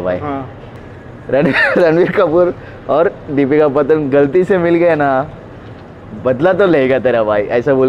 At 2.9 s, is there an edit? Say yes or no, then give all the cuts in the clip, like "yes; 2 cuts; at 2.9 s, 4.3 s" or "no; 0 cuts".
no; 1 cut; at 1.2 s